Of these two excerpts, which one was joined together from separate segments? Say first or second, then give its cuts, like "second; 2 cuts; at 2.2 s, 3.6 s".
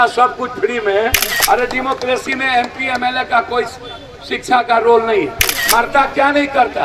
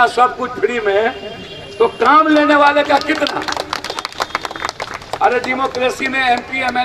first; 2 cuts; at 1.3 s, 5.5 s